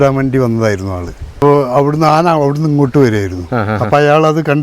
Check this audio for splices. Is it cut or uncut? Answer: cut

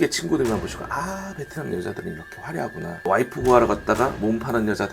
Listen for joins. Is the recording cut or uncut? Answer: cut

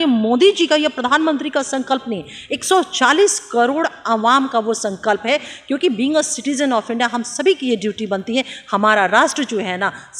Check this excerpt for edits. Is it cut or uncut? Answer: uncut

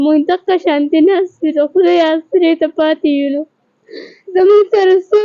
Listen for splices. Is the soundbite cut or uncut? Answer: uncut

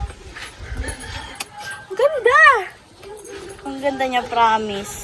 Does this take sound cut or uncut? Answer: uncut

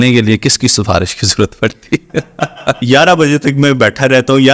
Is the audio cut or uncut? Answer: cut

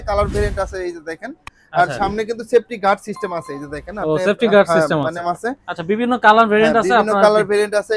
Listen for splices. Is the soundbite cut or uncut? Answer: cut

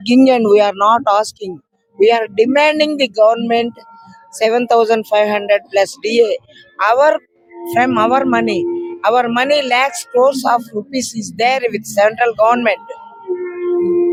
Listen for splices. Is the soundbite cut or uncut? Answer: uncut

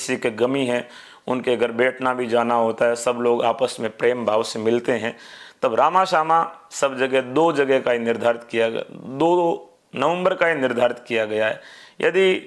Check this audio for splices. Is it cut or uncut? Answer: uncut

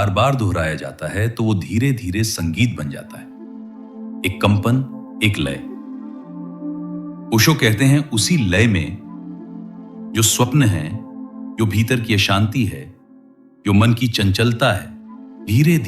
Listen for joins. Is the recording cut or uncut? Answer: uncut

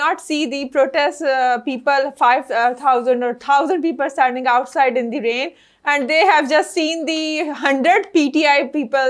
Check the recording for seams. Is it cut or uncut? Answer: uncut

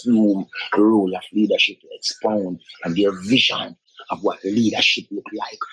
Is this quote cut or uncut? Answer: uncut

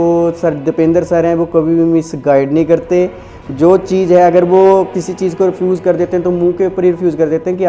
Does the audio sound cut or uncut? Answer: uncut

